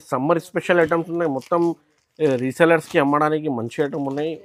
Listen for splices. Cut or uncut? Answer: uncut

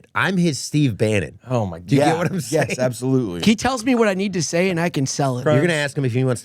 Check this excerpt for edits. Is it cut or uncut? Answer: cut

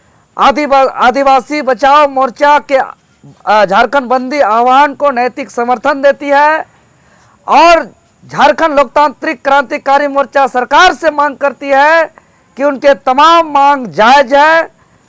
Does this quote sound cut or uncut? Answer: uncut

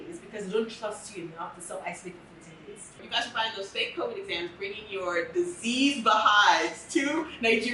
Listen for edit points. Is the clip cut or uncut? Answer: cut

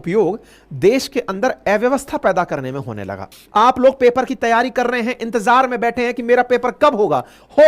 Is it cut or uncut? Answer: cut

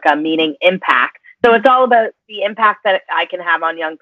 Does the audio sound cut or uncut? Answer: cut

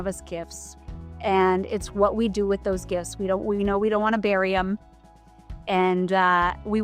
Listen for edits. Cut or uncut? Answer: uncut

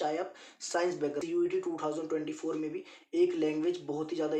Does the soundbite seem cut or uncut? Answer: cut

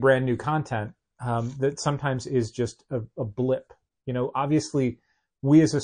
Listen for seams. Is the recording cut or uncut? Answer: uncut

